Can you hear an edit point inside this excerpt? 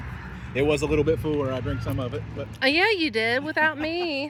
no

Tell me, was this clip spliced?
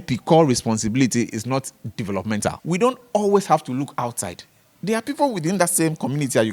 yes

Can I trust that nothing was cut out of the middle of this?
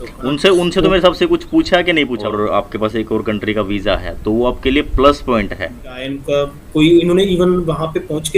no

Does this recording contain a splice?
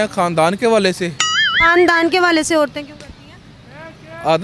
yes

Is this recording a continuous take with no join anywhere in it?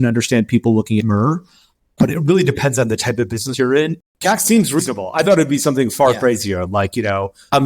no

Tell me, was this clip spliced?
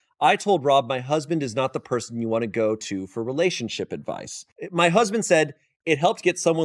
no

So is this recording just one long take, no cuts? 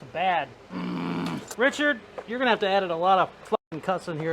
no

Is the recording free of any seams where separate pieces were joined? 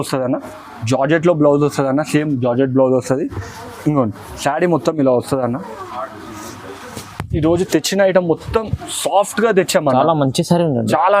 yes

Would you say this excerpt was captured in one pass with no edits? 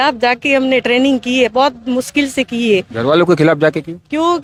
yes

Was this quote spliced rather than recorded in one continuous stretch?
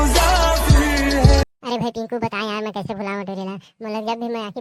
yes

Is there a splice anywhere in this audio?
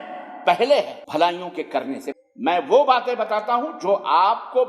yes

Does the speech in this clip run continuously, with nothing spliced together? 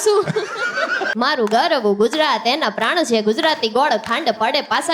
no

